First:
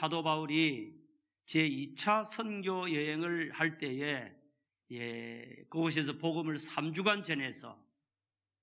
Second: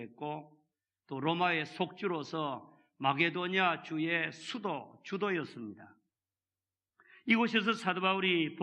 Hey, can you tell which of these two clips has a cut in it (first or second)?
first